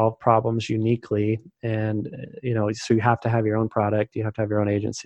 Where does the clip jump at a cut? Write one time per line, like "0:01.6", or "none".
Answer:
none